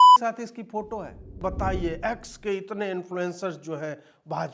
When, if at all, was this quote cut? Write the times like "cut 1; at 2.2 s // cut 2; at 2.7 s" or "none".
cut 1; at 1.4 s